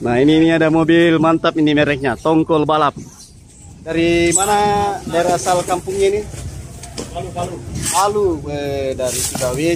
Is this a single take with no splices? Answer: no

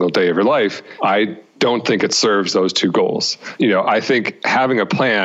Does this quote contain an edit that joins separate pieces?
yes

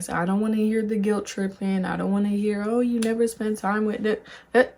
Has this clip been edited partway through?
no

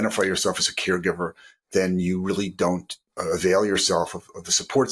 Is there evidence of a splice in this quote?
no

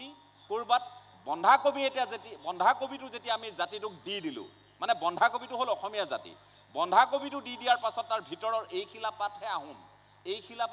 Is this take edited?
no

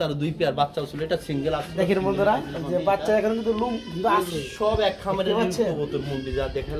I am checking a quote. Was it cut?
no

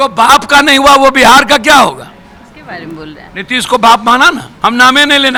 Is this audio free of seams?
yes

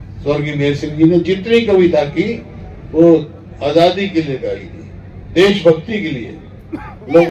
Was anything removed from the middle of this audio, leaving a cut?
no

